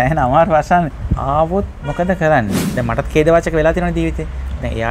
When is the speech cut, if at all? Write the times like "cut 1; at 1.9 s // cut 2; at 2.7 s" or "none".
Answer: cut 1; at 1.0 s // cut 2; at 2.6 s